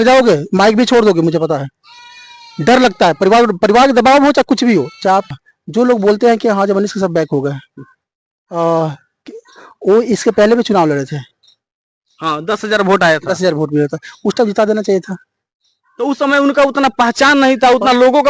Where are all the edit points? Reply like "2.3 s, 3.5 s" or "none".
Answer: 5.3 s

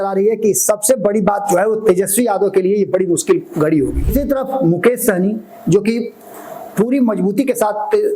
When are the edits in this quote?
4.1 s

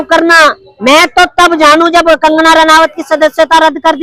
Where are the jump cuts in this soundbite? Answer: none

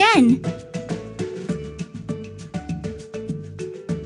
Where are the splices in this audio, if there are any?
1.0 s, 3.3 s

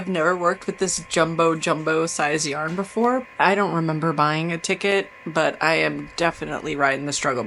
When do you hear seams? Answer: 3.3 s

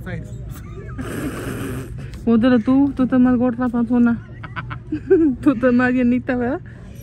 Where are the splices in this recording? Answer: none

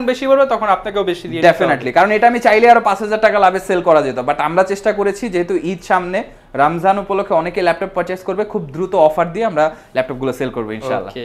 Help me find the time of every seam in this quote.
none

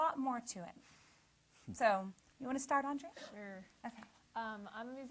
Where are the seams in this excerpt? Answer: 3.6 s

